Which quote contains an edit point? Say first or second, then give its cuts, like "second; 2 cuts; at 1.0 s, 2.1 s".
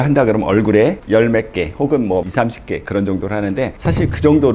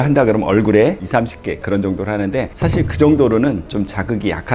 second; 1 cut; at 1.0 s